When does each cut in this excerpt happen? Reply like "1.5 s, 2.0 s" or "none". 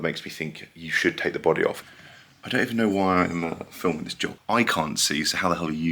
1.8 s, 4.3 s